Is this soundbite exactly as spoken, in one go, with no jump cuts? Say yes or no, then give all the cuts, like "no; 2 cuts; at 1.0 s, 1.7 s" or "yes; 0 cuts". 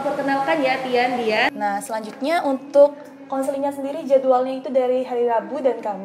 no; 1 cut; at 1.5 s